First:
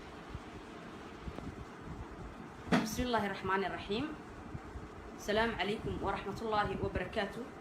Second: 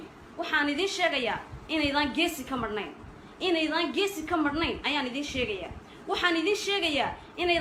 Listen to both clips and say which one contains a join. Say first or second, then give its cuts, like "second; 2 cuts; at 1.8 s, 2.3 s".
first; 1 cut; at 1.3 s